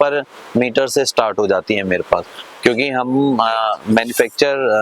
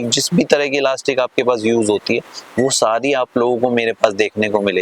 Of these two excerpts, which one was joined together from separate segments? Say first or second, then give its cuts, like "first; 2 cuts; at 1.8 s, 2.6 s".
first; 1 cut; at 2.4 s